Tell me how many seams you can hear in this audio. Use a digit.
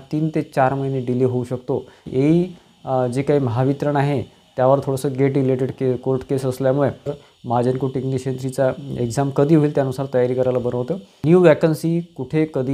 3